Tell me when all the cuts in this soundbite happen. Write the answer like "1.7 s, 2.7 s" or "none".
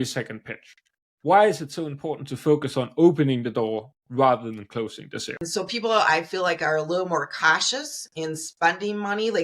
5.5 s